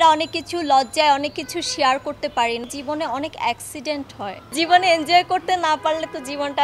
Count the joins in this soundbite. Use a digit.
2